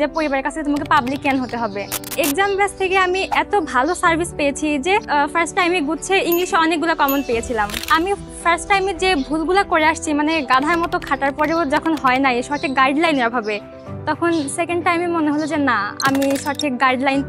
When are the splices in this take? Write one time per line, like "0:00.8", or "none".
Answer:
0:02.1
0:05.1
0:07.9

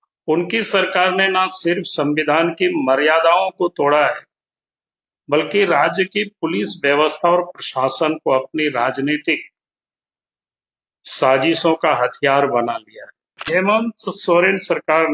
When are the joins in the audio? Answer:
0:13.5

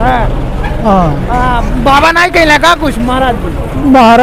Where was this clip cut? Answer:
none

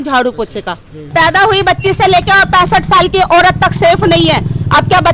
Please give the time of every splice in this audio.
0:00.9

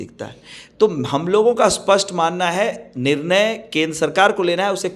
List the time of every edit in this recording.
none

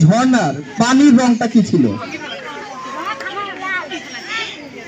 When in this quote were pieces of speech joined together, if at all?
none

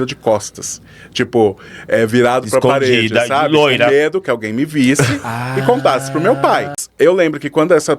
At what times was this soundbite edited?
0:06.8

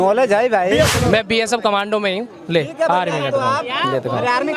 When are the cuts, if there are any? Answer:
0:00.9

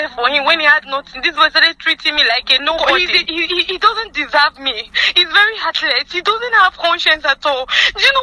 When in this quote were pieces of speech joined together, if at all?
0:02.8

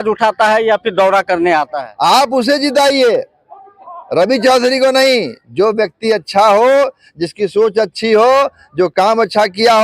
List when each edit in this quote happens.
0:01.8

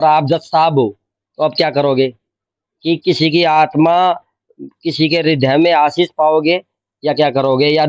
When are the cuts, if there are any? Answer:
none

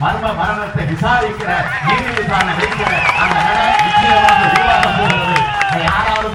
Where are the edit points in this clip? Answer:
none

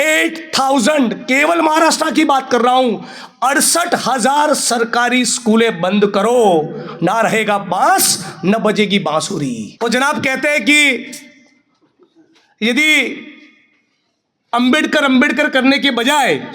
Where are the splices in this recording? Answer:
0:09.7

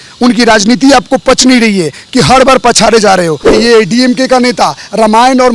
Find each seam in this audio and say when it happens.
0:03.4

